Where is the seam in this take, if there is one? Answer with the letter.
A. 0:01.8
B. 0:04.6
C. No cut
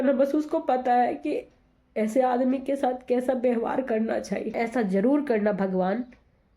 B